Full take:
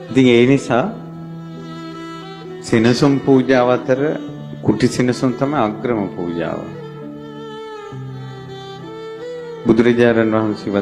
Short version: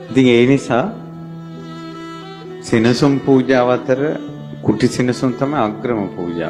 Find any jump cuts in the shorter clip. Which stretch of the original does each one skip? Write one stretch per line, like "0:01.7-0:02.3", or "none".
none